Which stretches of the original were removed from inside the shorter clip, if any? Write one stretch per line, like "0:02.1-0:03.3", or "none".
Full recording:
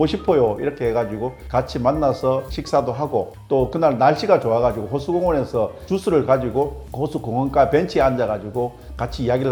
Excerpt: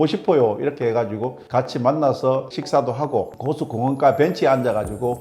0:03.3-0:06.9